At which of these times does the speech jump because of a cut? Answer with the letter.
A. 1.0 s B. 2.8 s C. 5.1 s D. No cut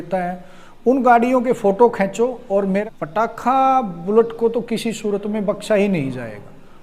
B